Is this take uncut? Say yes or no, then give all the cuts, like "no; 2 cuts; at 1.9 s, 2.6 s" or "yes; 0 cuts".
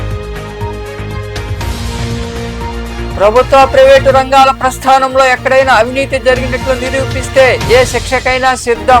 no; 1 cut; at 1.5 s